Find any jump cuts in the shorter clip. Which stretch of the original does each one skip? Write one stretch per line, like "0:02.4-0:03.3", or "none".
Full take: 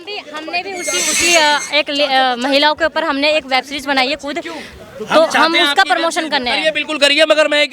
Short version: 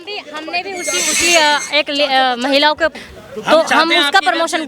0:02.9-0:04.6